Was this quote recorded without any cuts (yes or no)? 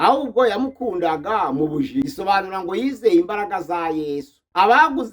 no